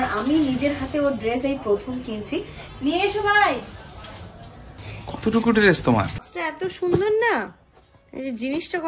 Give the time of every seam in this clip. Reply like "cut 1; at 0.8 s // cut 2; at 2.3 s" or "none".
cut 1; at 2.6 s // cut 2; at 6.2 s